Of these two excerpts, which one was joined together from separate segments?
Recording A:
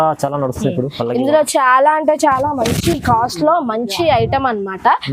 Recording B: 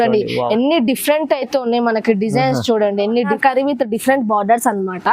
B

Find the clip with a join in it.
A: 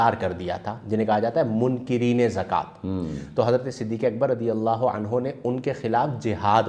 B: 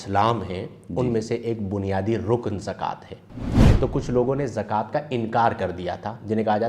B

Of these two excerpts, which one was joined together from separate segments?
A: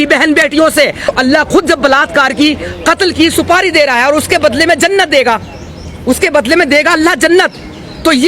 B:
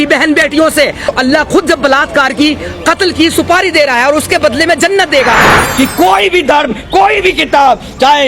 B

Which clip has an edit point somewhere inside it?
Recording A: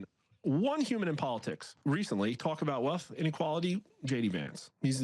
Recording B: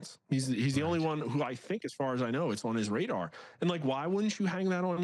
A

